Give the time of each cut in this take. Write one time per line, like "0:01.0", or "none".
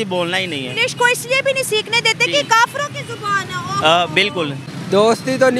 0:04.6